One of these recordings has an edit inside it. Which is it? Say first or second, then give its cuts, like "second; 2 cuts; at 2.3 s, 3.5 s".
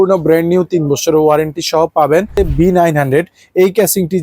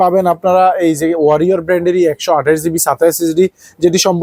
first; 1 cut; at 2.3 s